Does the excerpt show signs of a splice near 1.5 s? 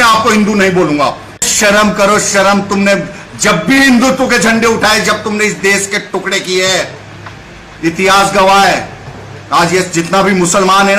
yes; 1 cut; at 1.5 s

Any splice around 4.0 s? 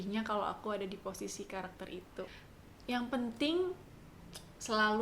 no; 1 cut; at 2.3 s

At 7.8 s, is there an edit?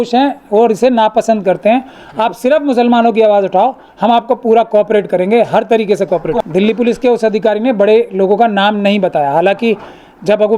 no; 1 cut; at 6.4 s

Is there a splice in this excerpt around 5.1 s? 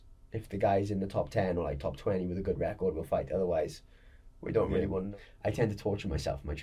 yes; 1 cut; at 5.1 s

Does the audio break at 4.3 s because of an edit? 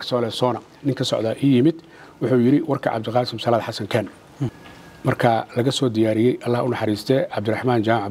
yes; 1 cut; at 4.3 s

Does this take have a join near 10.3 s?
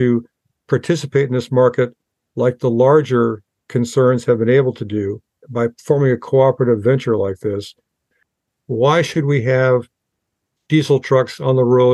no; 2 cuts; at 5.4 s, 8.2 s

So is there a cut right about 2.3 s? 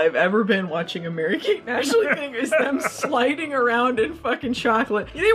no; 0 cuts

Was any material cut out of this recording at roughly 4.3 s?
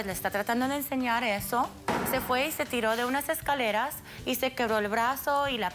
no; 1 cut; at 1.9 s

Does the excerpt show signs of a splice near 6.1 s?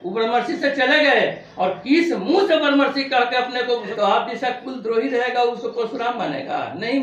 no; 1 cut; at 3.9 s

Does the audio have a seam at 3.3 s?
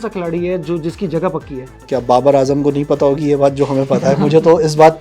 no; 1 cut; at 1.8 s

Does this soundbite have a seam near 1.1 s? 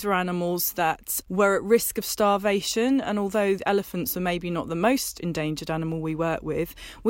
yes; 1 cut; at 1.1 s

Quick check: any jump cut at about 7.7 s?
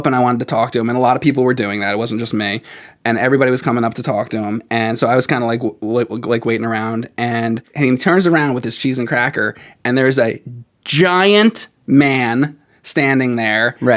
yes; 1 cut; at 7.7 s

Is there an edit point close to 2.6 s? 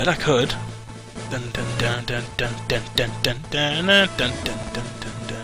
no; 1 cut; at 0.9 s

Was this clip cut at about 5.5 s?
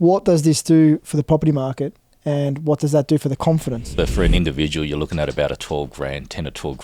no; 1 cut; at 3.8 s

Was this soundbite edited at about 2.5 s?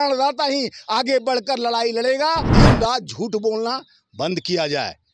yes; 1 cut; at 2.5 s

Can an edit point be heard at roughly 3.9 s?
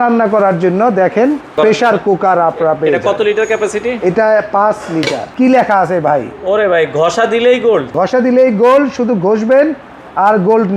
no; 3 cuts; at 1.5 s, 5.2 s, 7.9 s

